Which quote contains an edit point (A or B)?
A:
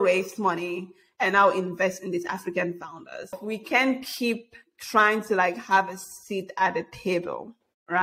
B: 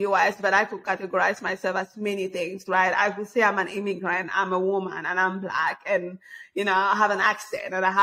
A